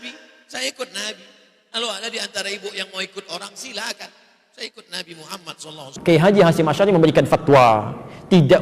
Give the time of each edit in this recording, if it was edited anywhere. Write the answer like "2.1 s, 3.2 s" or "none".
5.9 s

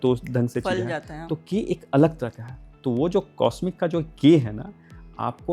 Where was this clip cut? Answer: none

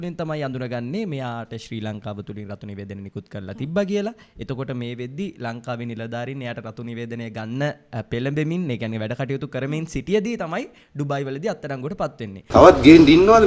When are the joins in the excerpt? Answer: 12.4 s

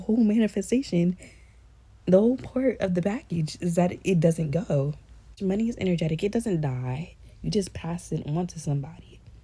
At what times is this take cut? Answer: 5.4 s

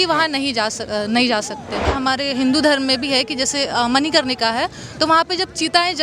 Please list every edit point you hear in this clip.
1.9 s

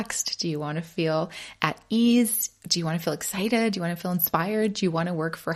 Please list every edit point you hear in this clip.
none

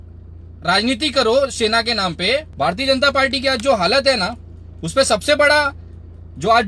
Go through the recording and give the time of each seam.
2.5 s

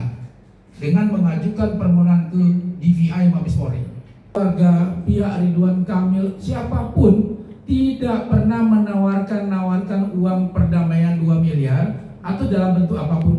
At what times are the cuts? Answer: 4.4 s

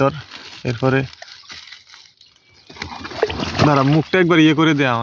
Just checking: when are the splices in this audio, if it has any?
none

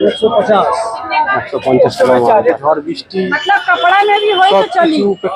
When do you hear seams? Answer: 2.6 s

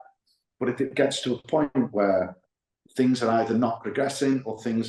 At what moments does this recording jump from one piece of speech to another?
none

